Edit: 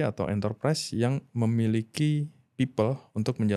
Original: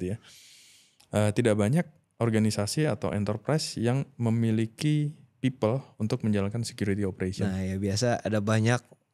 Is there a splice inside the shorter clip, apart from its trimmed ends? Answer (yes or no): no